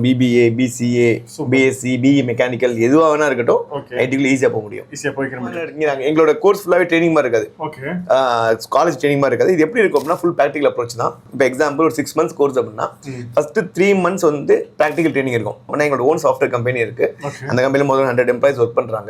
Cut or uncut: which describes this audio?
cut